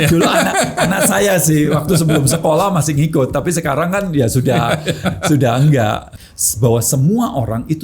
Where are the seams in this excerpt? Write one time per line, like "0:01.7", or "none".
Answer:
0:06.1